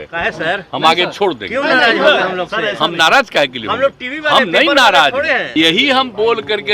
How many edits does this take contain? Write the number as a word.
one